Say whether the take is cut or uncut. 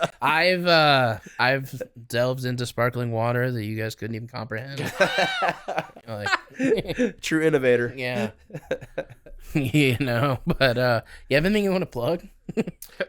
uncut